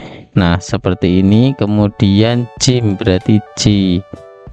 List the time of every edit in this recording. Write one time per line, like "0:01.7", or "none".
none